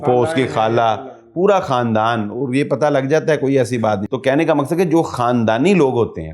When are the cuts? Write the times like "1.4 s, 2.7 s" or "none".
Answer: 4.1 s